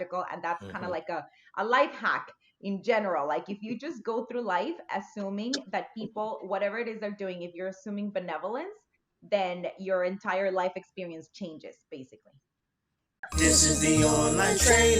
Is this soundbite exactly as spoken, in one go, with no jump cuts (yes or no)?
no